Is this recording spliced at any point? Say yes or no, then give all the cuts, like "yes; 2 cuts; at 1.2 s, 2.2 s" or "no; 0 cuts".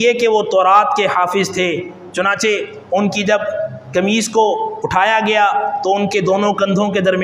no; 0 cuts